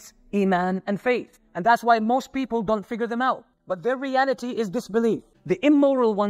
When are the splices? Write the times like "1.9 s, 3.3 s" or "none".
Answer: 5.3 s